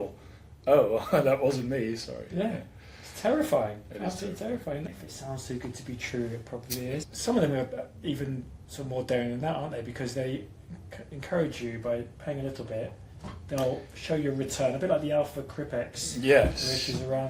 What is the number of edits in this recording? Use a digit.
2